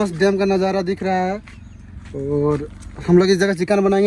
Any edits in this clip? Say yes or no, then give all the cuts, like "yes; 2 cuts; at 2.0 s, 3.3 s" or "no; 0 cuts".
no; 0 cuts